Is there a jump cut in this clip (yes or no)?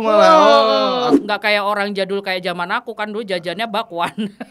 yes